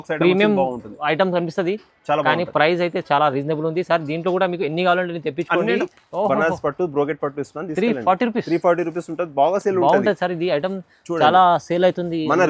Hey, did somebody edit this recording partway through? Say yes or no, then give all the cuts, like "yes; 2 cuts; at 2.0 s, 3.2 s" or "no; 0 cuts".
yes; 1 cut; at 5.8 s